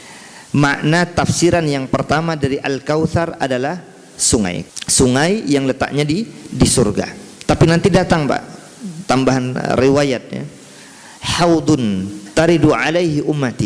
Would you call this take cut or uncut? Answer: cut